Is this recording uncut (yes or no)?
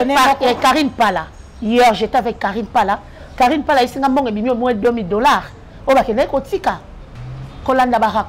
no